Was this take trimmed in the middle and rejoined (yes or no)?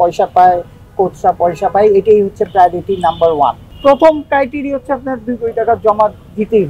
yes